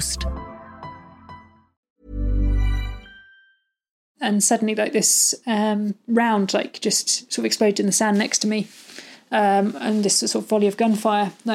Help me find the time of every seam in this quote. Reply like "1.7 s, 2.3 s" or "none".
4.1 s